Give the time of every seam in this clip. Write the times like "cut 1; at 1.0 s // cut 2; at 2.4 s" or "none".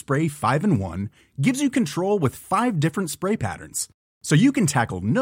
none